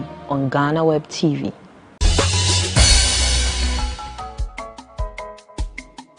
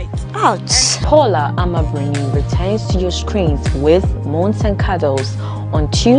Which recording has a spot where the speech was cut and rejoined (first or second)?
first